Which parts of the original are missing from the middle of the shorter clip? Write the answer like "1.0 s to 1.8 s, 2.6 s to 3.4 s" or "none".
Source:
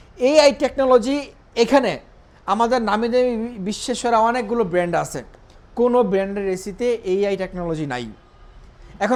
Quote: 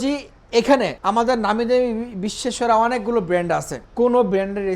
2.0 s to 2.4 s, 5.2 s to 5.6 s